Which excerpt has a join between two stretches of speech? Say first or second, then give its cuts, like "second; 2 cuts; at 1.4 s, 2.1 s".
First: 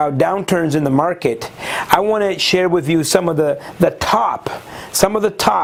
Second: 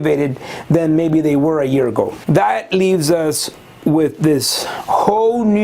second; 1 cut; at 2.2 s